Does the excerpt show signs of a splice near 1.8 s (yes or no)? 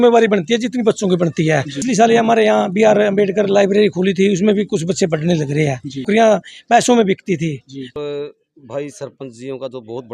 yes